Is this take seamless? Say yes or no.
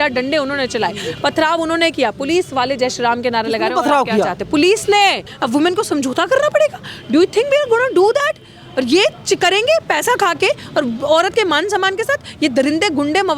no